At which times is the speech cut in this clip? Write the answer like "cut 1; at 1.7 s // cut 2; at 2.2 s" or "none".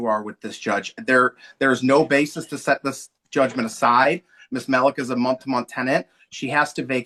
none